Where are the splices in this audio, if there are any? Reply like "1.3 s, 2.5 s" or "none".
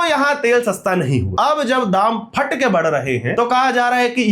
1.3 s, 3.3 s